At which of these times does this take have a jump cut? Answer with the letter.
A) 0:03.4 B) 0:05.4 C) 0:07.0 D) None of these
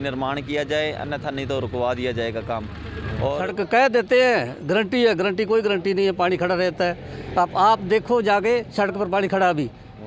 A